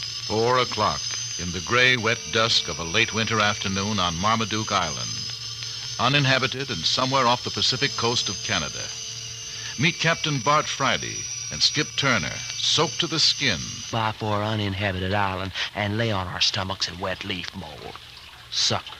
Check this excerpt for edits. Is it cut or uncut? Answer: uncut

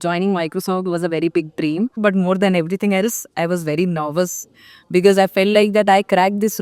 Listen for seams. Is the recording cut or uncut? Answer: cut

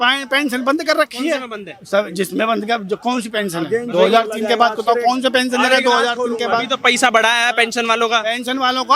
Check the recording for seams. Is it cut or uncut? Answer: uncut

